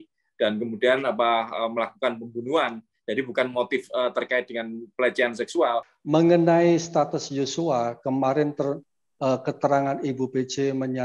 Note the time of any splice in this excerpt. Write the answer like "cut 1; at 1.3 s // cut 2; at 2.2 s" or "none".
cut 1; at 5.9 s